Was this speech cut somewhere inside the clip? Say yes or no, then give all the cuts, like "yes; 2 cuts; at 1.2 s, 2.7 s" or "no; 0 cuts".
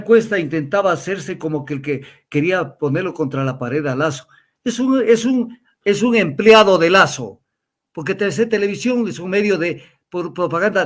no; 0 cuts